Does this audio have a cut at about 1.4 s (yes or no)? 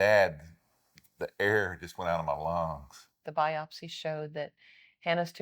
no